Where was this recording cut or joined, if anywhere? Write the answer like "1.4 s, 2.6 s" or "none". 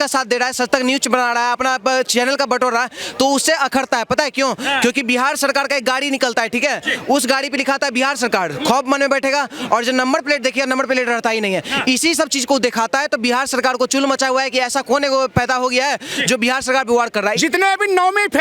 17.4 s